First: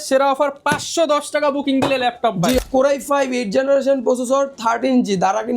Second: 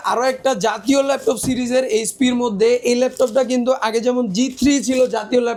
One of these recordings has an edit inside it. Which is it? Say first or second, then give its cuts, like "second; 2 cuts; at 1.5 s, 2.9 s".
first; 1 cut; at 2.6 s